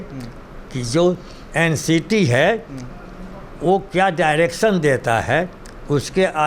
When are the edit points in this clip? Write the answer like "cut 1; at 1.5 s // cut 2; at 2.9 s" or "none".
none

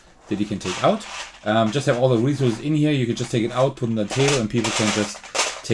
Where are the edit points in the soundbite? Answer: none

